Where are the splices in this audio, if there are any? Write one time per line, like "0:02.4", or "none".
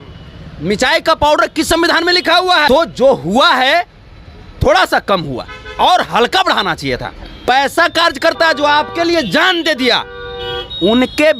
0:02.7
0:07.5